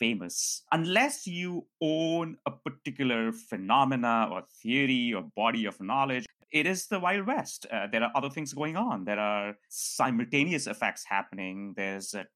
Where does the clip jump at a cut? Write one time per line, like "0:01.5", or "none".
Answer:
0:06.3